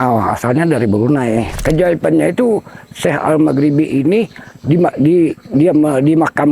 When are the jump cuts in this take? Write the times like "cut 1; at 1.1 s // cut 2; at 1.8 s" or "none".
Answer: cut 1; at 1.6 s